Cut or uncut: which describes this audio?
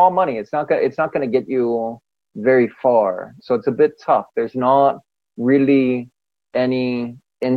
cut